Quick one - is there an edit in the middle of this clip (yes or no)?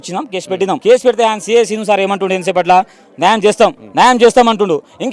yes